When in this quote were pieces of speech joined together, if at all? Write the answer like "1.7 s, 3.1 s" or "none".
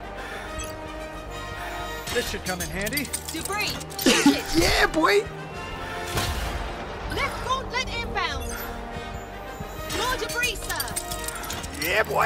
none